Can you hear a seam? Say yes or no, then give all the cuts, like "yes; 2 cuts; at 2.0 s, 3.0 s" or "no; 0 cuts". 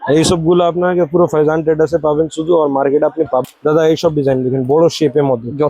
yes; 1 cut; at 3.4 s